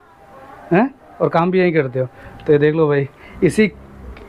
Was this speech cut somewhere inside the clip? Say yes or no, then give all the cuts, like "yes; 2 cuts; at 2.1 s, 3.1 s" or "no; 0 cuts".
no; 0 cuts